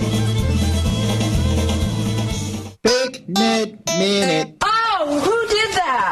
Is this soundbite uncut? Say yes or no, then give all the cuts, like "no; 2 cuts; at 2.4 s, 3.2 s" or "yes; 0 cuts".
no; 1 cut; at 2.7 s